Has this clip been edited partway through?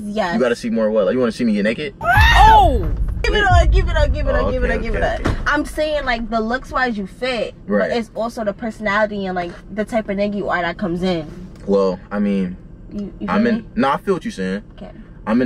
yes; 1 cut; at 3.3 s

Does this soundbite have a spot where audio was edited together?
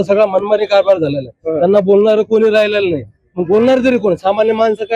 no; 0 cuts

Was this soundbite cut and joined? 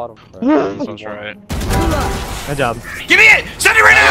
no; 0 cuts

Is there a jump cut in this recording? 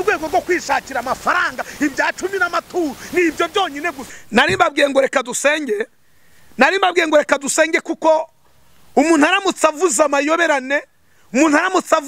no; 0 cuts

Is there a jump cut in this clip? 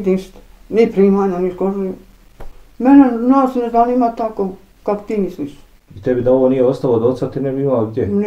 no; 0 cuts

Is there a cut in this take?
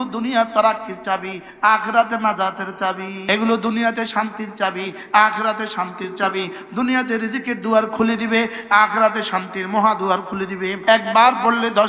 yes; 2 cuts; at 3.1 s, 10.8 s

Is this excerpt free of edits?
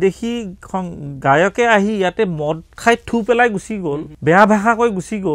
no; 1 cut; at 4.1 s

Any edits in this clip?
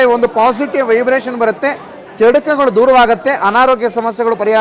no; 0 cuts

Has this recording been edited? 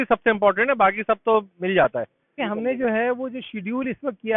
yes; 1 cut; at 2.4 s

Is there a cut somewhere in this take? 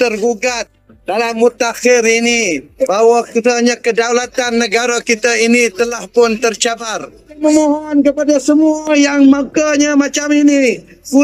yes; 1 cut; at 7.3 s

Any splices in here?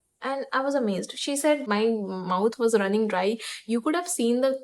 yes; 1 cut; at 1.6 s

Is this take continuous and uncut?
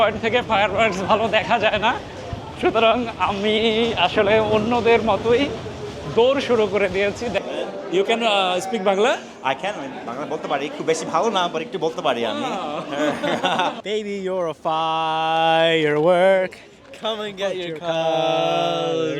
no; 2 cuts; at 7.4 s, 13.8 s

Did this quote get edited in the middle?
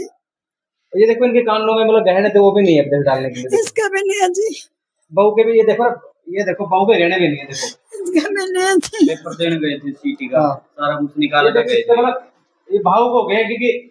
no; 0 cuts

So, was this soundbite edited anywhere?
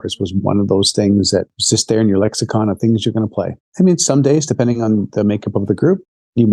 yes; 2 cuts; at 1.6 s, 3.6 s

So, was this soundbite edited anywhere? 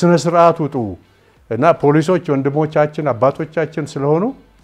no; 0 cuts

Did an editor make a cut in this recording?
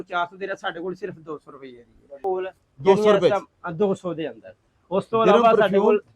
yes; 1 cut; at 2.1 s

